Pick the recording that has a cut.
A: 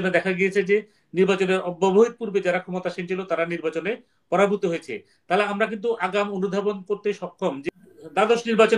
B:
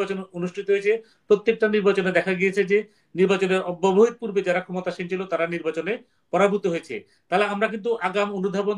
A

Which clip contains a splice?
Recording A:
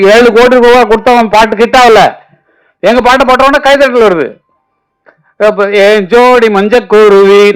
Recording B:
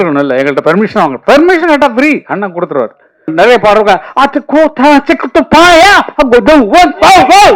B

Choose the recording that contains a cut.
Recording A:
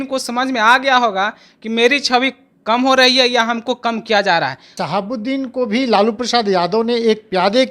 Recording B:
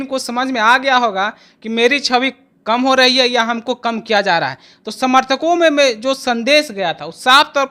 A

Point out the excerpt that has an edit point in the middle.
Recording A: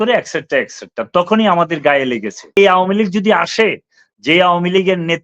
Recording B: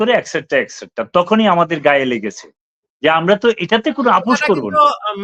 A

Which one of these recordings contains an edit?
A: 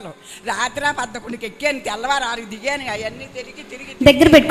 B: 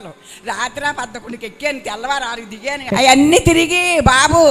B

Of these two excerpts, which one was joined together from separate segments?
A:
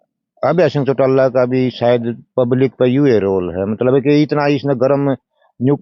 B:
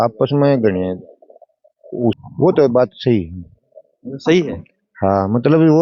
B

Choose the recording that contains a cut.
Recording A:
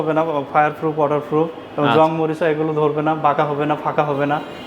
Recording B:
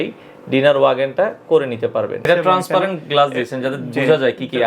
B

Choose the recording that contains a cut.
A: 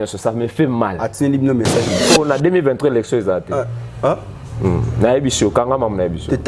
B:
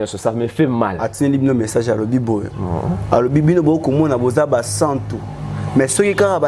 A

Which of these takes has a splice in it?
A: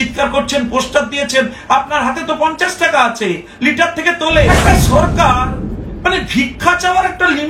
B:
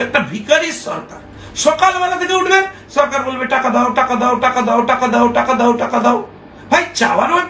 A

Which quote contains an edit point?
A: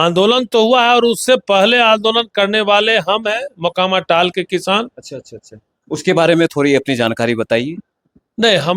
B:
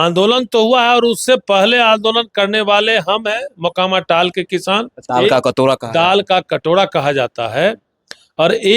B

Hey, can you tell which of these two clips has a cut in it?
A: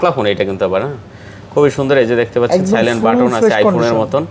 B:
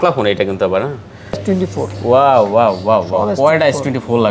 B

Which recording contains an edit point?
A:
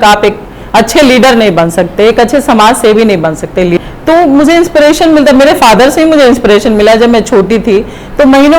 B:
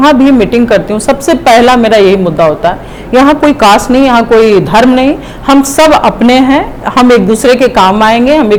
A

